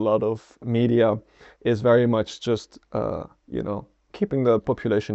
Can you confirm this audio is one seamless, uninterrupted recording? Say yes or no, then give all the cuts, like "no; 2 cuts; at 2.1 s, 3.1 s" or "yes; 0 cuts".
yes; 0 cuts